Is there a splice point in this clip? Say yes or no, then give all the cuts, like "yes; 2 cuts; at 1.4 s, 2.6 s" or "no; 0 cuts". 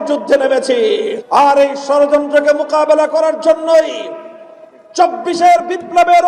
yes; 1 cut; at 1.2 s